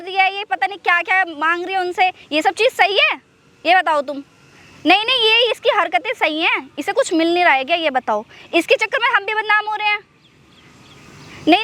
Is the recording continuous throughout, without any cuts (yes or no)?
yes